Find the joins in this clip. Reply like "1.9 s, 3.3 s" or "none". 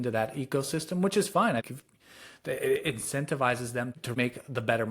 1.6 s, 4.1 s